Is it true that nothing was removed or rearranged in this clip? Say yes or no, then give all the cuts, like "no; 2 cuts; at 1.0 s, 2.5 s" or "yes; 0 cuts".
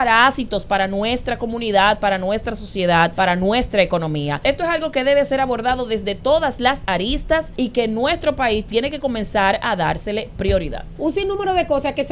no; 4 cuts; at 3.1 s, 4.4 s, 7.5 s, 10.9 s